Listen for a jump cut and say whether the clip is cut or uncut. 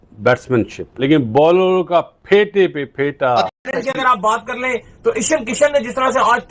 cut